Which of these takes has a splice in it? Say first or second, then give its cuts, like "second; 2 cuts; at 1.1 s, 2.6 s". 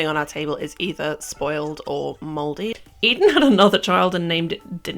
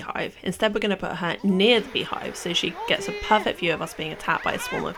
first; 1 cut; at 2.7 s